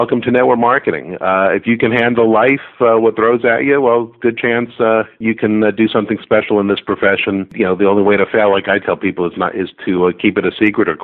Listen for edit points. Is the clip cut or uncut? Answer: cut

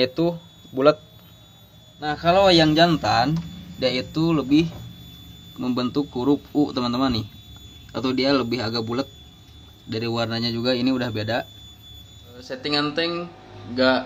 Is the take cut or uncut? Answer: cut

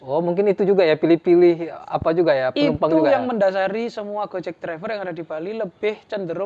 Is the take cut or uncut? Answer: uncut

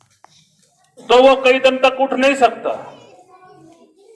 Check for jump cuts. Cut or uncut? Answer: uncut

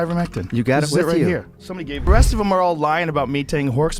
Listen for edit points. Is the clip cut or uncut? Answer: cut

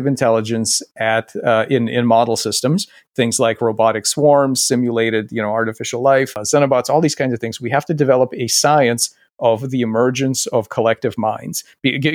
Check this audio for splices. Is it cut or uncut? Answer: cut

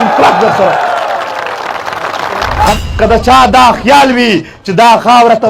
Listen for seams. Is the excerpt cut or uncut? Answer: cut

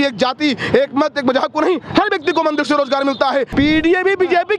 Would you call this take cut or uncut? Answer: cut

